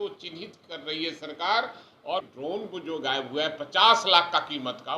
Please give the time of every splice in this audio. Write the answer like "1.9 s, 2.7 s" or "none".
2.2 s